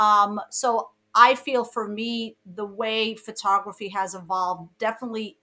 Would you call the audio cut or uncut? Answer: uncut